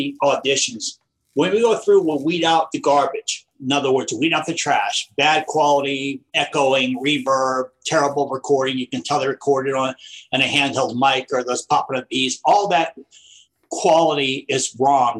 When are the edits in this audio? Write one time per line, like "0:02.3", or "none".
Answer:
0:06.2